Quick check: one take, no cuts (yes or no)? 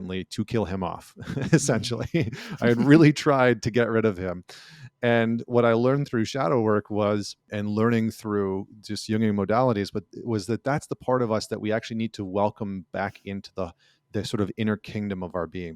yes